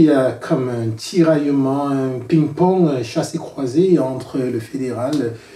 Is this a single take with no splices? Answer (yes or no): yes